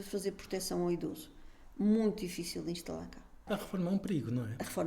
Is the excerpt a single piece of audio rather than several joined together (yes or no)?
no